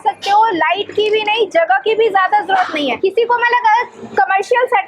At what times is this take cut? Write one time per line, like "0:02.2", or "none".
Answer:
0:03.0